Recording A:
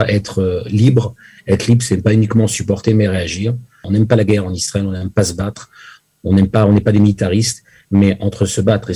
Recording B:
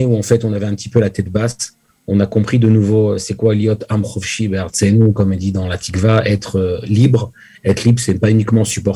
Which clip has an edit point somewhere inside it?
A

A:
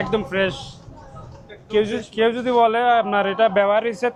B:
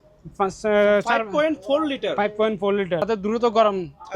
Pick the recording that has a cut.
B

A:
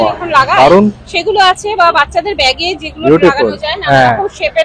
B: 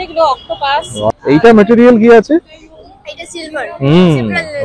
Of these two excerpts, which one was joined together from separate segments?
B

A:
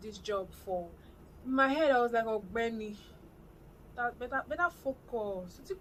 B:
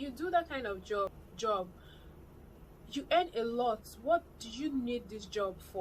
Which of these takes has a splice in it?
B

